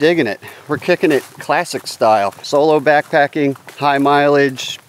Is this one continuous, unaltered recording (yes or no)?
no